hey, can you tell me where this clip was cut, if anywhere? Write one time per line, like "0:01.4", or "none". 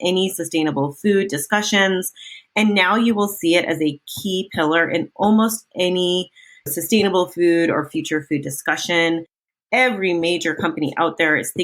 0:06.7